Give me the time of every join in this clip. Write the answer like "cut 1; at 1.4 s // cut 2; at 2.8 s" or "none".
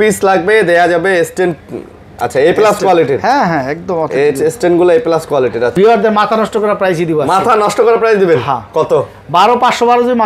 cut 1; at 5.7 s

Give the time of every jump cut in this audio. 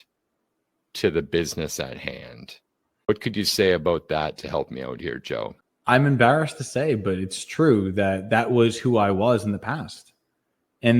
cut 1; at 3.1 s // cut 2; at 5.7 s

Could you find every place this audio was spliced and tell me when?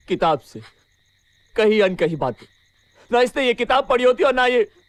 none

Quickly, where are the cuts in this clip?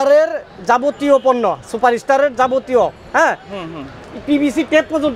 none

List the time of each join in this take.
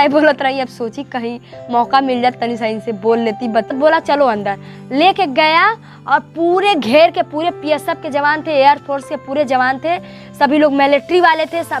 cut 1; at 3.7 s

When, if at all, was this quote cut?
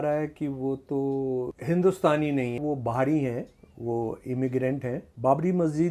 cut 1; at 1.6 s // cut 2; at 2.6 s // cut 3; at 5.1 s

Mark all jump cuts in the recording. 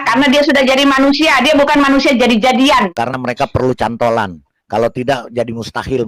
cut 1; at 2.9 s

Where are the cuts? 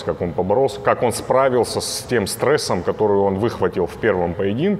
none

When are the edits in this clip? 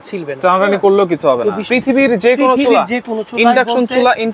cut 1; at 1.6 s

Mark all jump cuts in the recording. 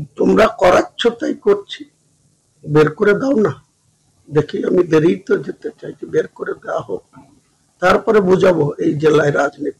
none

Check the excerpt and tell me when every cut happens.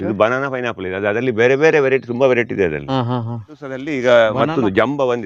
cut 1; at 3.9 s

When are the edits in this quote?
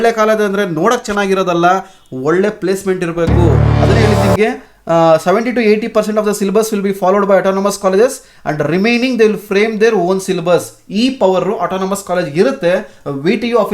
cut 1; at 3.7 s

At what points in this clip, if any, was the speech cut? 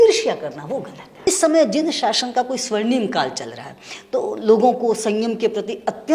cut 1; at 1.0 s

